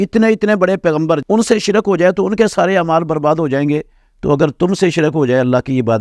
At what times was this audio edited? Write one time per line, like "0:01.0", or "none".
0:01.2